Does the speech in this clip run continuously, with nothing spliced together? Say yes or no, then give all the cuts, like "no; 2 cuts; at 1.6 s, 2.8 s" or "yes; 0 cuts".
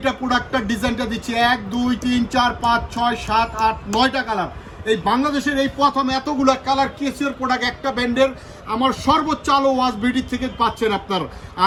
yes; 0 cuts